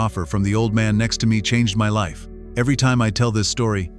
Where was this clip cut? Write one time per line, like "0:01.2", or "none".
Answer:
none